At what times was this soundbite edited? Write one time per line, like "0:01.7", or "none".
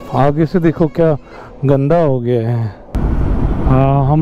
0:02.9